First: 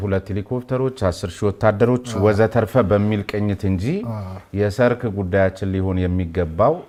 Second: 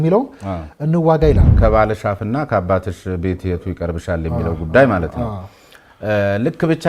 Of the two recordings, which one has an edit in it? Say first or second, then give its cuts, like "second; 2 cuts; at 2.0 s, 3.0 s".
second; 1 cut; at 1.5 s